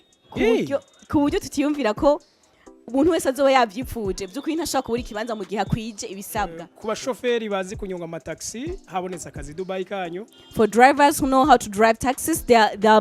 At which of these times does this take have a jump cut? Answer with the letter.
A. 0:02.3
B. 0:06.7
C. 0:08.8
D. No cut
B